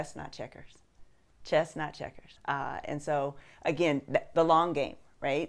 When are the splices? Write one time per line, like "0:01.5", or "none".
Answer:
0:01.3
0:02.6